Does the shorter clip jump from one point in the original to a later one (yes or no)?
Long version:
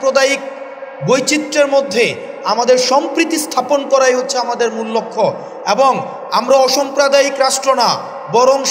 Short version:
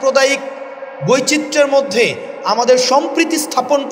no